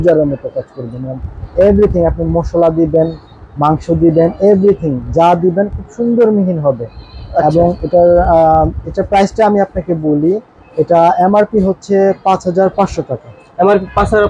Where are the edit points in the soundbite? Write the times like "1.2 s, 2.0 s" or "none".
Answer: none

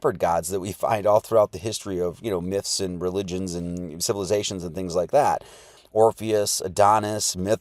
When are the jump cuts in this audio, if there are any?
5.7 s

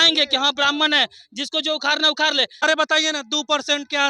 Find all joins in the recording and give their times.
2.6 s

